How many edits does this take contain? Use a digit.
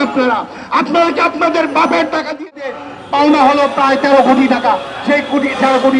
1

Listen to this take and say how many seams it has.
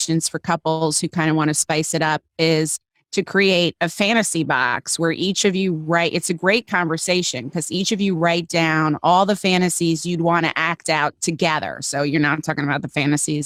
0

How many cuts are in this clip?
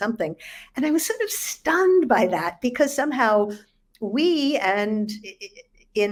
0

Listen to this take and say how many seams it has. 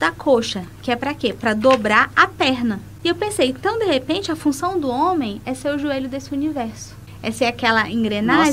2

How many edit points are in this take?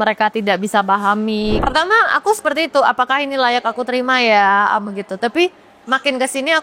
1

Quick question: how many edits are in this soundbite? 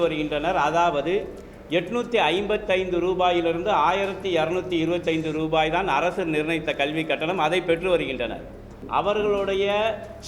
1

